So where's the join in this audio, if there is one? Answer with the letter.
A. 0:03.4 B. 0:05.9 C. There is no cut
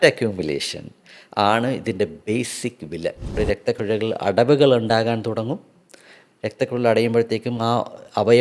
A